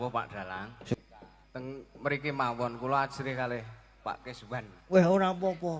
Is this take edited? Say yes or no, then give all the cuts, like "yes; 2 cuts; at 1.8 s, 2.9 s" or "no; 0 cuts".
yes; 1 cut; at 0.9 s